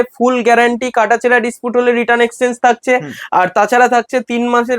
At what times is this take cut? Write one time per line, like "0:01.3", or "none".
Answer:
none